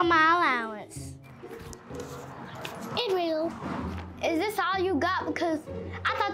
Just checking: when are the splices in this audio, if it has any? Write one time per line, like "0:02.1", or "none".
0:04.1